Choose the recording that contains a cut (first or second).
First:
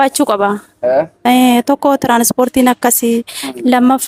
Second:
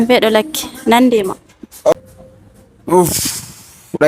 second